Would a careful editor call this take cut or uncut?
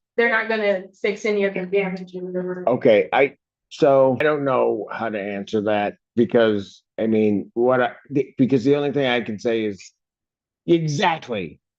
cut